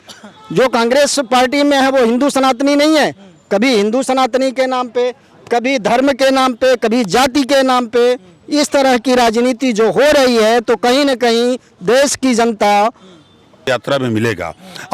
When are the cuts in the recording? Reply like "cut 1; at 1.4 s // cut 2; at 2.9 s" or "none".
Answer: cut 1; at 13.6 s